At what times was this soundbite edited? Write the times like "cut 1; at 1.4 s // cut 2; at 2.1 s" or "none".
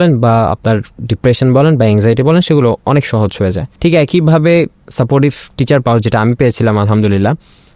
cut 1; at 3.7 s